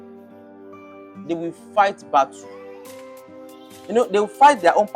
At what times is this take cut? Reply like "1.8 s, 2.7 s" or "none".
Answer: 1.1 s